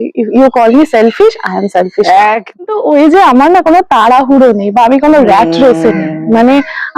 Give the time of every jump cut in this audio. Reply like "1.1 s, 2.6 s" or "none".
2.7 s